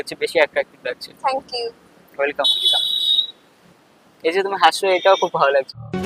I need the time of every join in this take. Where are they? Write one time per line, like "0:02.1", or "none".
none